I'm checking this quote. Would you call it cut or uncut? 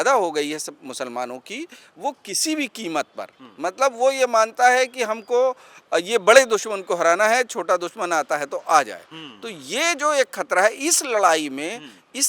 cut